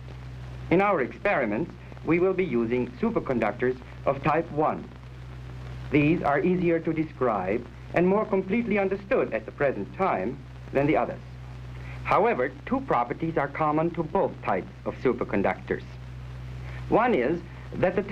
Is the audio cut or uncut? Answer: uncut